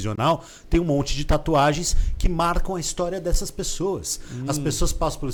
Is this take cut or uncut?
uncut